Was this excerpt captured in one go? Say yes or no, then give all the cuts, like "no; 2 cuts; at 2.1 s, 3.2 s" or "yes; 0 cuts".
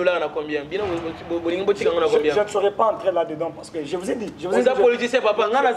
yes; 0 cuts